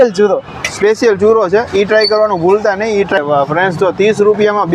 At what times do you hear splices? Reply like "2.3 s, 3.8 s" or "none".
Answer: 3.2 s